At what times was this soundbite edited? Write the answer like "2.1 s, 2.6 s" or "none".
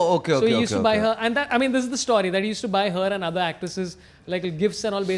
none